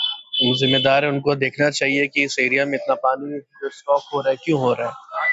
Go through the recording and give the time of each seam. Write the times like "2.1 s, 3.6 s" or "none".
none